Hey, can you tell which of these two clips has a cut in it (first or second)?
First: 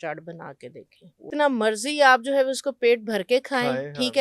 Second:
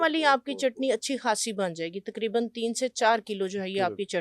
first